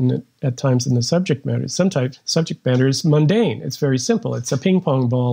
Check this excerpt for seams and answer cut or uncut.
uncut